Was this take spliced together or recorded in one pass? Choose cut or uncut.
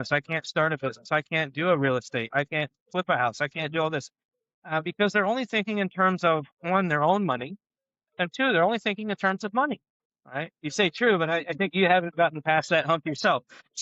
uncut